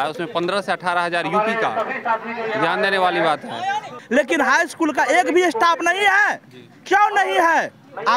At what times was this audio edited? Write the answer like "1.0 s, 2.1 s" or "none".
3.9 s